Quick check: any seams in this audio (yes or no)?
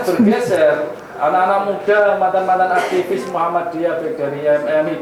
no